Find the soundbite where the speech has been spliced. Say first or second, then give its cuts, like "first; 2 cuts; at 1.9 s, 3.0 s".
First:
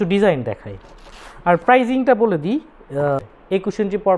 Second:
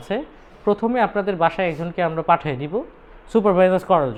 first; 1 cut; at 3.2 s